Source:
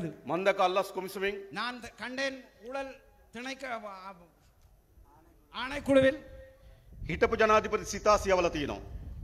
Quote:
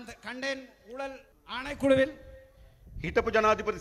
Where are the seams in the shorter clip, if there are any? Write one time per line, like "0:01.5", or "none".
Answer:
0:01.3